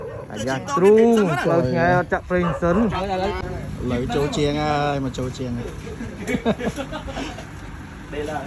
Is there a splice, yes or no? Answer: yes